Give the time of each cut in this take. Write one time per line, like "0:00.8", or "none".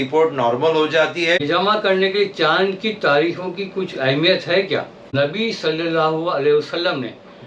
0:01.4
0:05.1